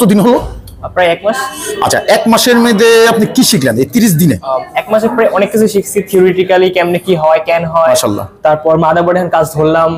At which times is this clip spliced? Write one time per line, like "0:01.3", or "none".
none